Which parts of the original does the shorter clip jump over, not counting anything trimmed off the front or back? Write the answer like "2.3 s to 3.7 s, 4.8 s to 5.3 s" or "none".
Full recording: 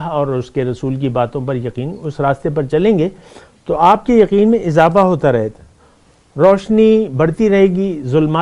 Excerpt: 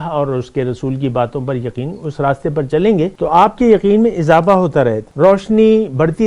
3.1 s to 3.6 s, 5.5 s to 6.2 s